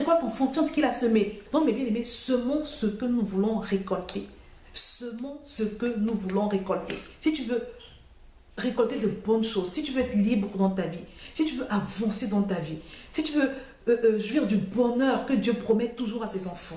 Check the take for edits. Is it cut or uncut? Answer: cut